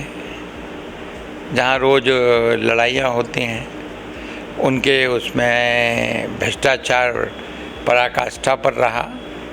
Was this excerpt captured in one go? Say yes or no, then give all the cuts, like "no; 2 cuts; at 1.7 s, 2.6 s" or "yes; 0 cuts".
yes; 0 cuts